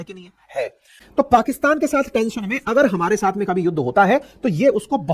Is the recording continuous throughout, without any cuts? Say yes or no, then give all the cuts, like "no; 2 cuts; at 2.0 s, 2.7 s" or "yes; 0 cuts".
no; 1 cut; at 1.0 s